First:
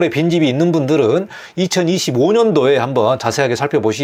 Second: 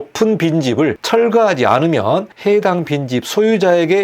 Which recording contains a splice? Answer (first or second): second